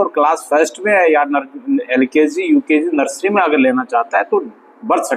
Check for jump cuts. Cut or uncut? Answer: uncut